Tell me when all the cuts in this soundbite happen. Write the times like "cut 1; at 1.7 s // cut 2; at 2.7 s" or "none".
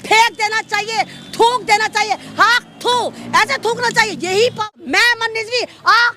cut 1; at 4.7 s

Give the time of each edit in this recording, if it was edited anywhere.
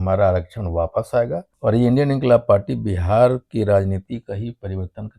cut 1; at 1.5 s

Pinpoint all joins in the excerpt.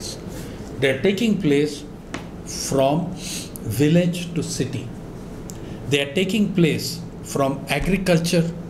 none

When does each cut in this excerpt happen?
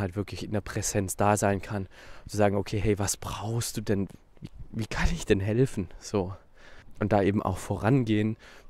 cut 1; at 4.1 s // cut 2; at 6.9 s

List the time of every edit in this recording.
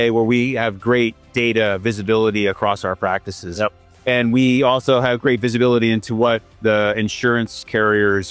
none

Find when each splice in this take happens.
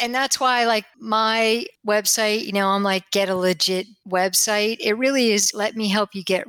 cut 1; at 0.9 s // cut 2; at 4.0 s // cut 3; at 5.5 s

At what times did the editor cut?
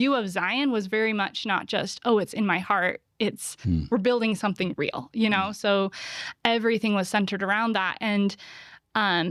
none

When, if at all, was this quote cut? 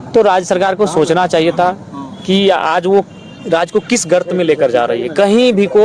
none

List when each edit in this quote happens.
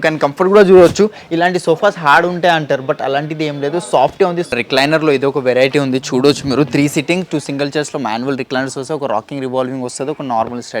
cut 1; at 4.5 s

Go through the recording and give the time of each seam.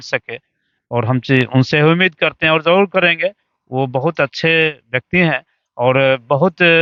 none

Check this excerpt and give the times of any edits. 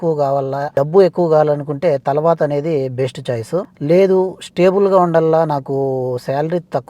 cut 1; at 0.7 s // cut 2; at 3.7 s

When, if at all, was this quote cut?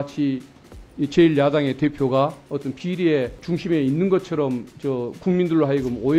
cut 1; at 3.4 s // cut 2; at 4.7 s

